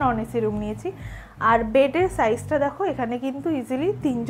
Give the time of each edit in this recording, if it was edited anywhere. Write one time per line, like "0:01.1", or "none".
none